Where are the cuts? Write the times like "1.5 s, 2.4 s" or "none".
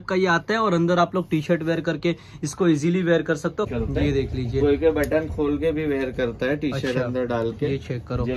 3.7 s